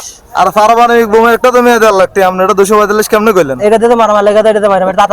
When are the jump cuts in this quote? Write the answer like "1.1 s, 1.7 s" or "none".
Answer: none